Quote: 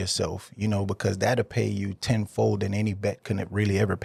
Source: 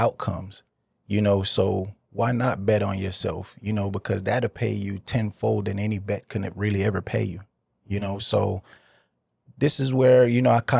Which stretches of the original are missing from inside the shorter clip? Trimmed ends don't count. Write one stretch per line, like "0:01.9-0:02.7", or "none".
none